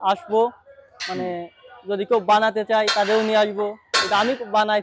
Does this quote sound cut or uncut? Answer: uncut